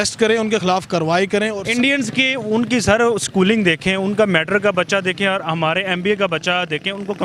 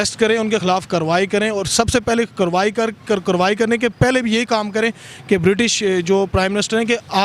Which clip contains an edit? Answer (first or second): first